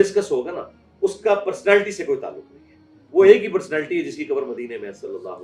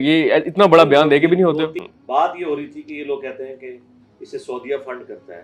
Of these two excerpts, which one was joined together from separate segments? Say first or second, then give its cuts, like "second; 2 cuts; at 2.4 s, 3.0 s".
second; 1 cut; at 1.8 s